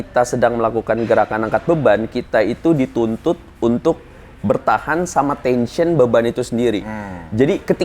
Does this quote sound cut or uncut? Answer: uncut